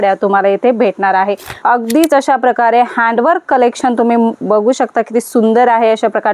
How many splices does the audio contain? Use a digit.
1